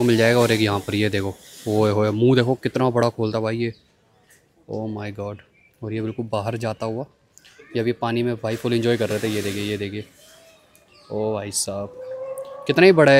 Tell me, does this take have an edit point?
no; 0 cuts

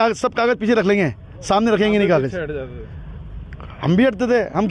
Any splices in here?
no; 0 cuts

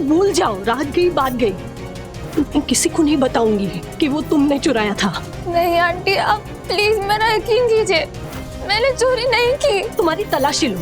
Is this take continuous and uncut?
no; 2 cuts; at 5.3 s, 9.9 s

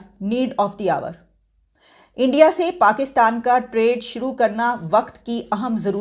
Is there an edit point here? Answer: no; 0 cuts

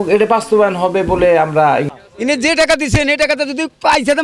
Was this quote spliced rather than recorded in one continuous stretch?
yes; 1 cut; at 1.9 s

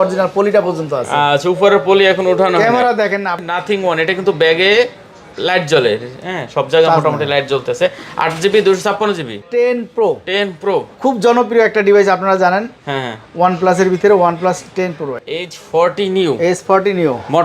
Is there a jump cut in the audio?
yes; 3 cuts; at 3.4 s, 9.5 s, 15.2 s

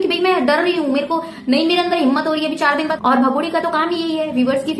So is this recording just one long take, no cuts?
no; 1 cut; at 2.9 s

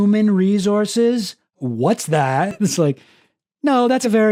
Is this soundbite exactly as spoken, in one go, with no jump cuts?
yes; 0 cuts

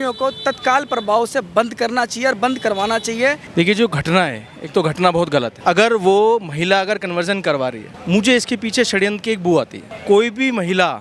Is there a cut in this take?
no; 0 cuts

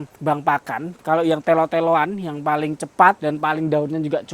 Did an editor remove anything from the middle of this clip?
yes; 1 cut; at 1.0 s

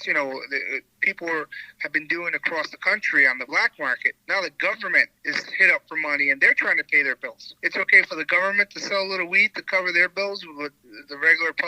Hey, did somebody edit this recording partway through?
yes; 3 cuts; at 4.1 s, 5.2 s, 7.5 s

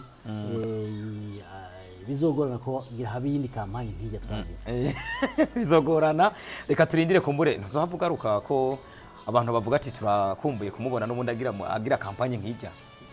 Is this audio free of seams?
yes; 0 cuts

